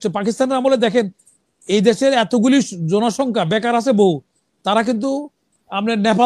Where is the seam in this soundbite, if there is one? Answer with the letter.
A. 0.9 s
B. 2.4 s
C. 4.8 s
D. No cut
D